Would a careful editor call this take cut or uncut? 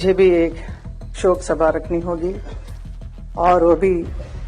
uncut